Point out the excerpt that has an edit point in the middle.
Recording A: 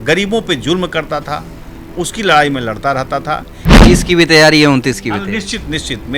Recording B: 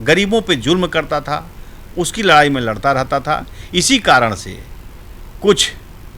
A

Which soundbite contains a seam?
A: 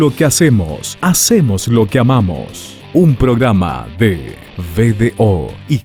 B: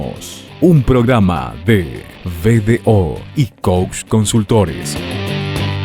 B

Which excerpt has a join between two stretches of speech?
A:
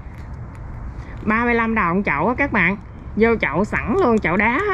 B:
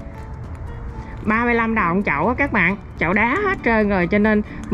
B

